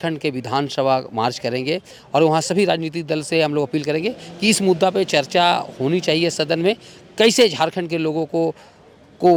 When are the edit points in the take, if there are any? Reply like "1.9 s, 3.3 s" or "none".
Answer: none